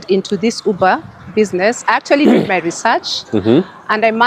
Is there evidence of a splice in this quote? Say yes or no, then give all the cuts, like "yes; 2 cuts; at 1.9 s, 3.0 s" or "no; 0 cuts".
no; 0 cuts